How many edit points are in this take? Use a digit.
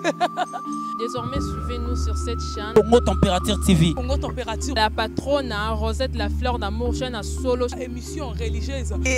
0